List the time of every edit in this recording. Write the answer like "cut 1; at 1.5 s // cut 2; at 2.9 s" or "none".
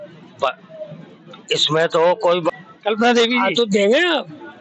cut 1; at 2.5 s